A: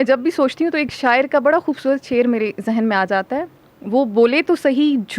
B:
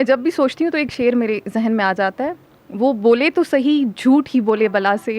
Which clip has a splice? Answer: B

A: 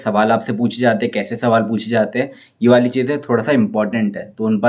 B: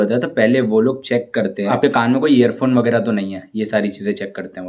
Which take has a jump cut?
B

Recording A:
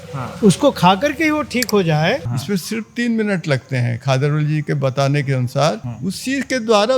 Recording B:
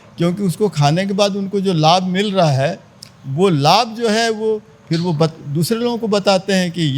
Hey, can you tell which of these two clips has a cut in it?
A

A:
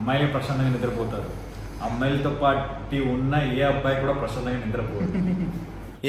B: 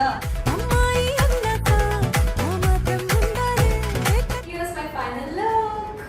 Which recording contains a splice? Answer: B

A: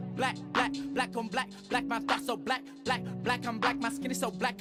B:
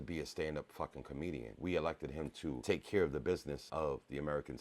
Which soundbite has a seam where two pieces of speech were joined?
B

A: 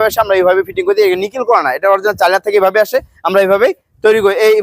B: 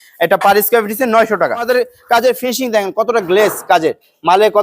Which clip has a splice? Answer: B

